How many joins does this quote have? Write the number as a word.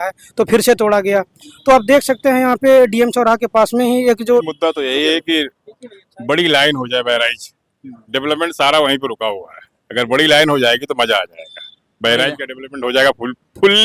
one